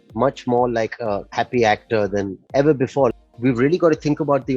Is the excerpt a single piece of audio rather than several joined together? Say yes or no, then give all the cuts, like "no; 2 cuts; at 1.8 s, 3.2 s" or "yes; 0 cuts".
no; 3 cuts; at 1.3 s, 2.4 s, 3.1 s